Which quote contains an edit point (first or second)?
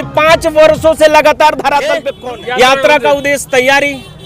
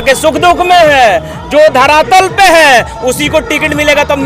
first